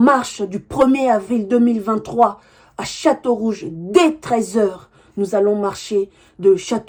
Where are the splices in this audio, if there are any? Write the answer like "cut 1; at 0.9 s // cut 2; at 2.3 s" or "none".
none